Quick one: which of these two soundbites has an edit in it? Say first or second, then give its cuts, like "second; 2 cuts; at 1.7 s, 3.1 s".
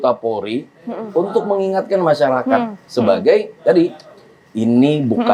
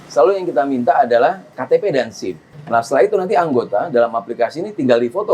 second; 2 cuts; at 1.5 s, 2.5 s